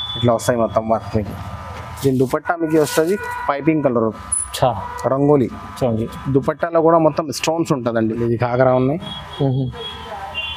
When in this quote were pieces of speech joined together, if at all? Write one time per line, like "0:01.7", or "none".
0:08.2